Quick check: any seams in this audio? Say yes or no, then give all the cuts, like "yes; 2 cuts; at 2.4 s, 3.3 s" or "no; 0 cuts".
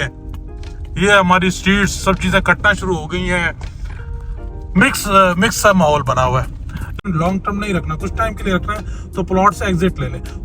yes; 1 cut; at 7.0 s